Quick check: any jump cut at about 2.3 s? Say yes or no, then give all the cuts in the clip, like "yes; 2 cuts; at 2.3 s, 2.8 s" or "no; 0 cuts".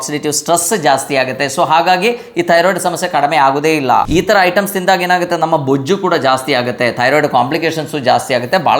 no; 1 cut; at 4.0 s